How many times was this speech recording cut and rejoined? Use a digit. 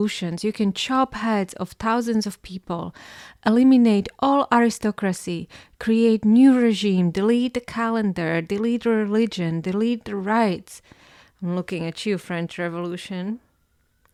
0